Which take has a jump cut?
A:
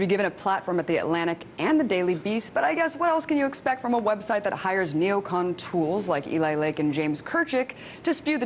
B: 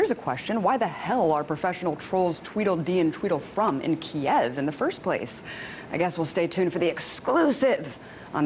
B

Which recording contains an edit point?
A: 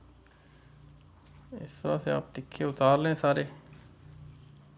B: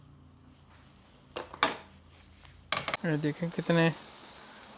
B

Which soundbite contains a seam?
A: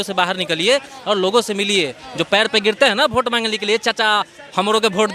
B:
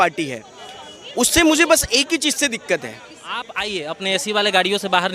B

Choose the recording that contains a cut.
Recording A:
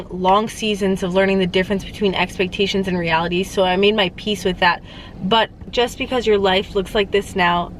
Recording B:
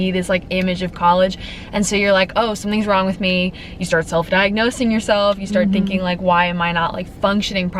A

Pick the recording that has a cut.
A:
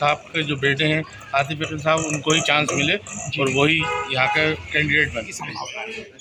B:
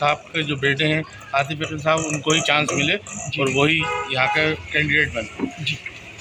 A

